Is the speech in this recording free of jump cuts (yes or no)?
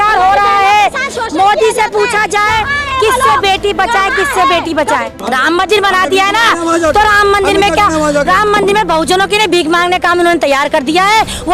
no